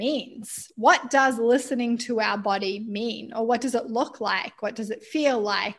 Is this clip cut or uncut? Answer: uncut